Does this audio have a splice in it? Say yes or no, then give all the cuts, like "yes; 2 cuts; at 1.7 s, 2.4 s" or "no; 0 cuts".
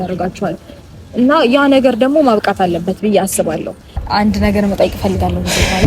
yes; 1 cut; at 4.0 s